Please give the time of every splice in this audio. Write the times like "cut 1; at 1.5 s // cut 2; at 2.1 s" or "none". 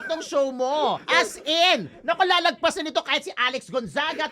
cut 1; at 1.0 s